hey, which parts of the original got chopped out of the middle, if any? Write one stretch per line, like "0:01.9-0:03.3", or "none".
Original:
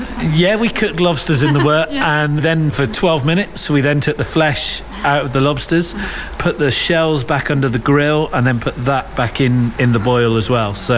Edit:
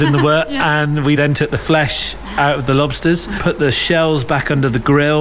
0:02.4-0:03.6
0:06.0-0:06.3